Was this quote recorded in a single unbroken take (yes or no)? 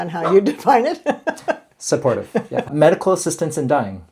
no